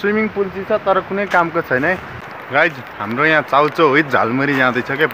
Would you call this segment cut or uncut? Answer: cut